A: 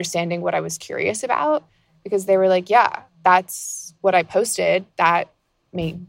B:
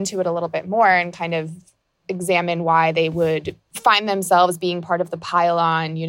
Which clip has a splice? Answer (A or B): B